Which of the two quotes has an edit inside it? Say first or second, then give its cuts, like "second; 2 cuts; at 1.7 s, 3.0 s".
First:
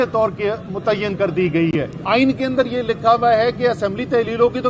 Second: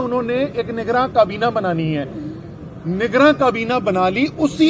first; 1 cut; at 2.0 s